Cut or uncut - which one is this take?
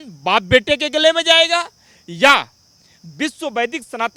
uncut